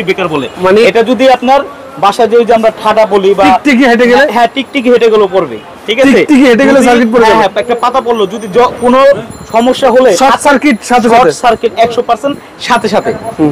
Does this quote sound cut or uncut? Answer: uncut